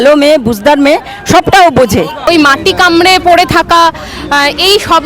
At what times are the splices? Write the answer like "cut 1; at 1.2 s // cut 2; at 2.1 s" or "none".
cut 1; at 2.3 s